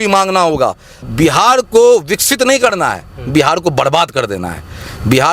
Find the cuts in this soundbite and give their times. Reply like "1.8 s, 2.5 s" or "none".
1.0 s